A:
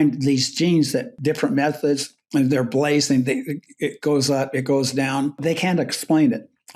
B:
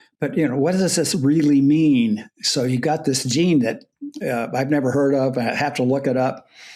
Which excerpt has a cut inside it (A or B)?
A